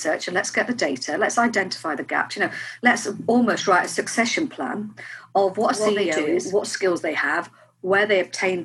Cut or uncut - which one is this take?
cut